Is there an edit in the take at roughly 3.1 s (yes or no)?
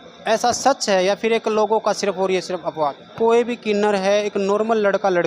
yes